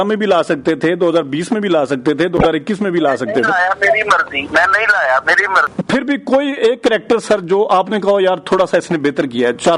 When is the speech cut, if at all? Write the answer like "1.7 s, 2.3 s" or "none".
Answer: 5.7 s